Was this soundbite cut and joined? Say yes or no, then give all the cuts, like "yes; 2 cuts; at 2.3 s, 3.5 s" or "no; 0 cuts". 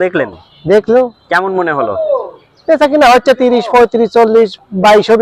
no; 0 cuts